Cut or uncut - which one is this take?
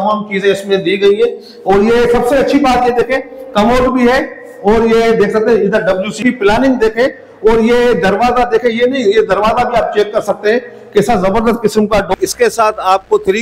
cut